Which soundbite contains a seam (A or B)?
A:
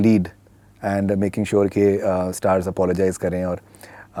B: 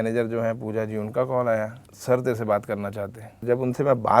B